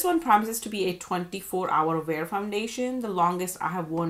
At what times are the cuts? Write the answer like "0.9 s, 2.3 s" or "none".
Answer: none